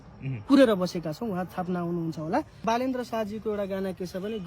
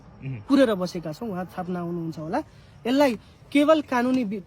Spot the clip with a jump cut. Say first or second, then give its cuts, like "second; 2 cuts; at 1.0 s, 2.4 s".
first; 1 cut; at 2.6 s